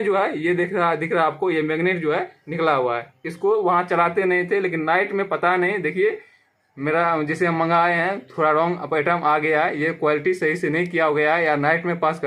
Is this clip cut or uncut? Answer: uncut